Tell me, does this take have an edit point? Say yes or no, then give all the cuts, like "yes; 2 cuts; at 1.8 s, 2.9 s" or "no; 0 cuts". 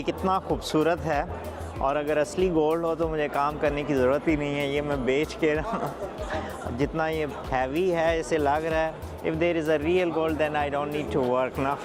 no; 0 cuts